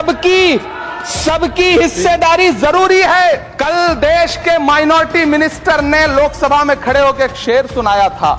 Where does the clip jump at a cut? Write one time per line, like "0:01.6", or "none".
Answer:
0:03.5